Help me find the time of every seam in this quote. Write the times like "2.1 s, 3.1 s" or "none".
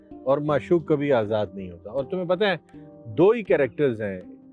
none